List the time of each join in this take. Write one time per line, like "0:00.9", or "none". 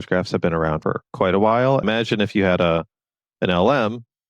0:00.8
0:01.8